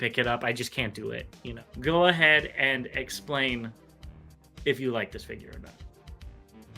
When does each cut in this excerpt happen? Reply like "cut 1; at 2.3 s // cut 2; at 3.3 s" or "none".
cut 1; at 1.5 s